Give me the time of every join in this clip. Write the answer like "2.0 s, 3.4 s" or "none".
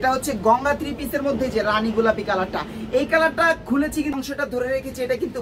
4.2 s